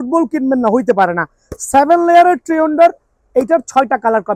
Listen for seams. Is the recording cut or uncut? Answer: uncut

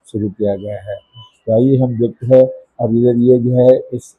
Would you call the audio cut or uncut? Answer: uncut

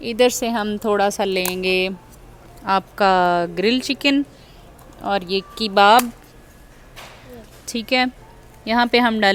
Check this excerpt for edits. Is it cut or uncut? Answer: uncut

